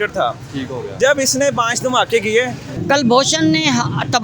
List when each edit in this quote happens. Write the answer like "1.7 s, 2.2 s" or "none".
2.6 s